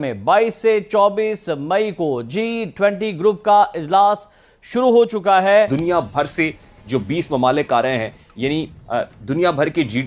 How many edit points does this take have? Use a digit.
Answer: 1